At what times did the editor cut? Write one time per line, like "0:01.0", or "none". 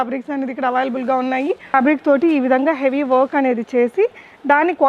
0:01.7